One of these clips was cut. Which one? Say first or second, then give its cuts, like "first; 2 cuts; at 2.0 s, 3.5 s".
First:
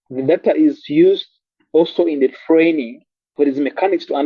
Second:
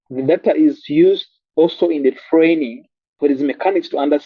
second; 1 cut; at 1.4 s